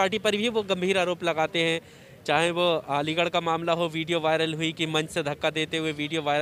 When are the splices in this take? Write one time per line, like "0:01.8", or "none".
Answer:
none